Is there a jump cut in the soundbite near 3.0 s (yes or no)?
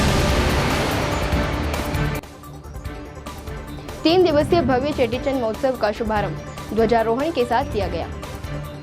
no